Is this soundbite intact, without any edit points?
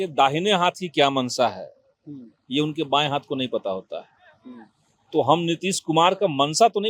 yes; 0 cuts

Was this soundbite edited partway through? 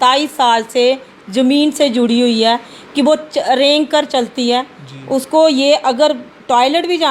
no; 0 cuts

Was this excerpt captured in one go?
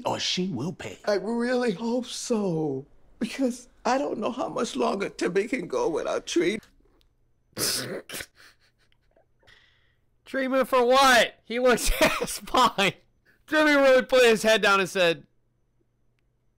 yes; 0 cuts

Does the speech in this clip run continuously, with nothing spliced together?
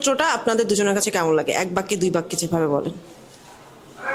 yes; 0 cuts

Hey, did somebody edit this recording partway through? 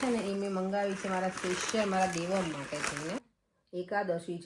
yes; 1 cut; at 3.3 s

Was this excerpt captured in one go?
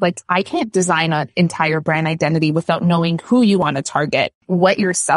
yes; 0 cuts

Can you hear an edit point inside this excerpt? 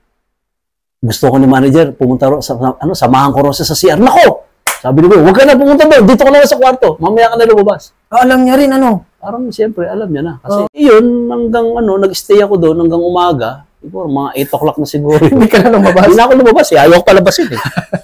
no; 0 cuts

